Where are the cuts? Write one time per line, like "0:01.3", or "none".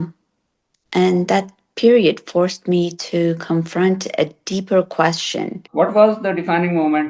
0:05.6